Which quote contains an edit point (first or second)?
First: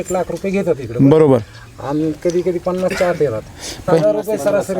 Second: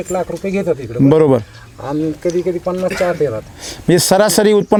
first